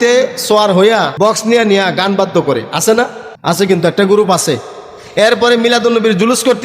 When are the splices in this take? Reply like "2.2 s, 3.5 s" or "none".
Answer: 1.1 s, 3.3 s